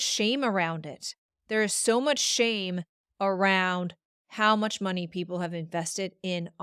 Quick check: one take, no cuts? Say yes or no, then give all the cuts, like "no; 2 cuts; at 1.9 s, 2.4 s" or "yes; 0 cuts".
yes; 0 cuts